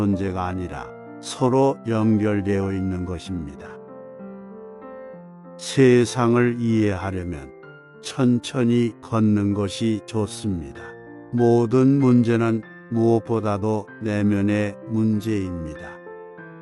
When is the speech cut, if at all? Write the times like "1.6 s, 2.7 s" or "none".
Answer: 3.5 s, 5.2 s